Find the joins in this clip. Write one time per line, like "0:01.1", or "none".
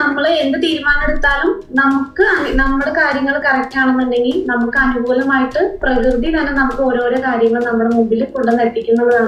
none